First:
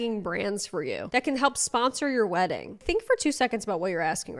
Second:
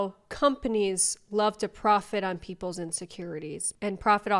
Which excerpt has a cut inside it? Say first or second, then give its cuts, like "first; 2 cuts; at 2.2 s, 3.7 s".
first; 2 cuts; at 1.0 s, 2.8 s